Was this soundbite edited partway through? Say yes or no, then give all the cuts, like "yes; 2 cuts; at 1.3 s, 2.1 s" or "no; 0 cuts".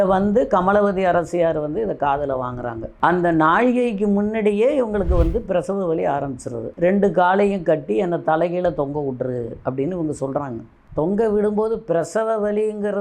yes; 3 cuts; at 2.9 s, 6.7 s, 10.7 s